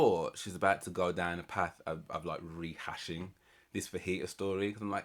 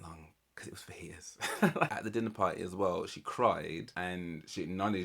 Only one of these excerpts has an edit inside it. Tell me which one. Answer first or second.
second